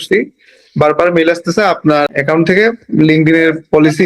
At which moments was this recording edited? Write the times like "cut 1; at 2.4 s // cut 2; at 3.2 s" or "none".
cut 1; at 2.1 s